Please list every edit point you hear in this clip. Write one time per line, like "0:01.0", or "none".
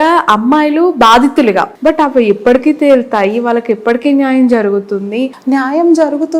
0:01.7
0:05.3